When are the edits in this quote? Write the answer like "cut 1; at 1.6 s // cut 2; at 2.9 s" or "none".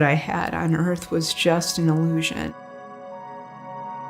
cut 1; at 2.5 s